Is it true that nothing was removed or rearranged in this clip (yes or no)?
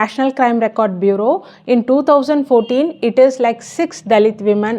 yes